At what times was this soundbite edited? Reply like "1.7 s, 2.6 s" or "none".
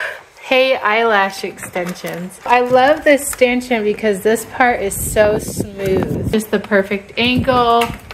2.5 s, 6.3 s